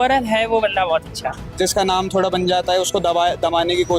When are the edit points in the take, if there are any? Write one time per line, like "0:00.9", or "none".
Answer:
0:01.5

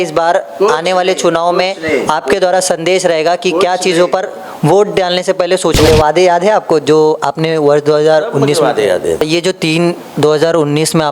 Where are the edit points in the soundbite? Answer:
0:05.9
0:09.2

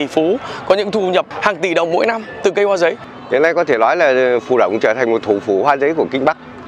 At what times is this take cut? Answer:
0:01.3
0:03.1

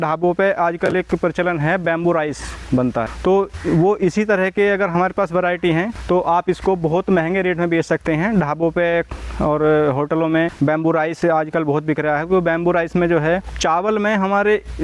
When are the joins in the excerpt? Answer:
0:03.1
0:06.0
0:10.5
0:13.5

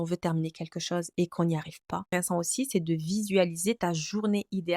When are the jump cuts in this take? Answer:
0:02.1

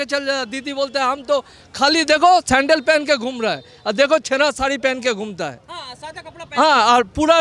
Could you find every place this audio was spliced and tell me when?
none

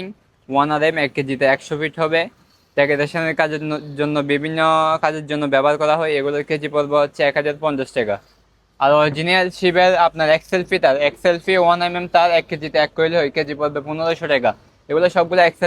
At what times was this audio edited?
none

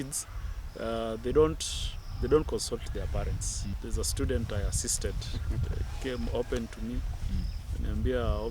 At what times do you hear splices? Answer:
0:03.8

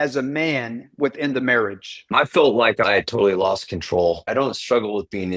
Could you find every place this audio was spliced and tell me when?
0:02.1
0:02.8
0:04.3

